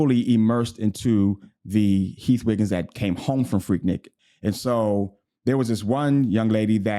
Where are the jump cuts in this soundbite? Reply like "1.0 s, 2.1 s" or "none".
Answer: 4.1 s

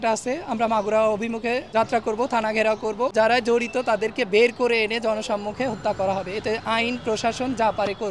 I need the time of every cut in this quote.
1.7 s, 3.1 s

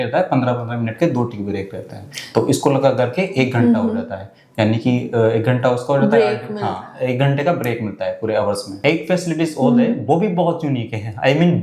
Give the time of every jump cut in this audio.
none

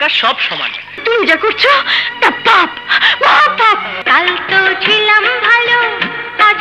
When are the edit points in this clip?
none

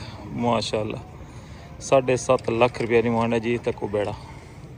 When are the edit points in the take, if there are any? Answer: none

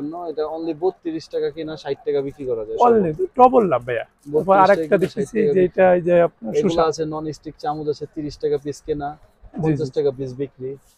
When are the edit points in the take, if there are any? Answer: none

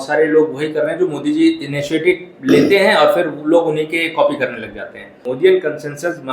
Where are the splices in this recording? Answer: 5.2 s

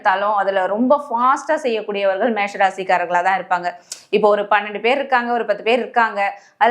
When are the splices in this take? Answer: none

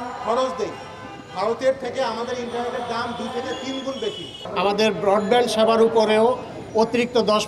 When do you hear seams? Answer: 4.4 s

